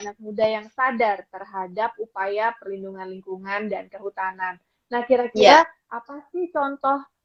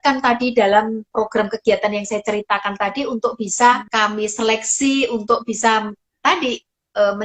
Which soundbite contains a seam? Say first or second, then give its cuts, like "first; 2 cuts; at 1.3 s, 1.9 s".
second; 2 cuts; at 1.1 s, 3.9 s